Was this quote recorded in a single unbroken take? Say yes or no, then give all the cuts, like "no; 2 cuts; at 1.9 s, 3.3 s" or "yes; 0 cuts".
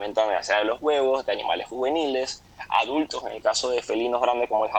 yes; 0 cuts